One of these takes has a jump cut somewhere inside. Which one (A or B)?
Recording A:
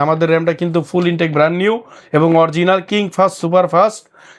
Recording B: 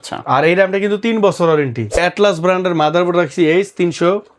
B